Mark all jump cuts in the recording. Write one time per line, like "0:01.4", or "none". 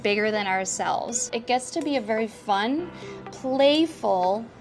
0:01.3